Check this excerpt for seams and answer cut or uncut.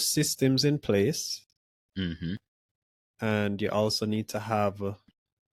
uncut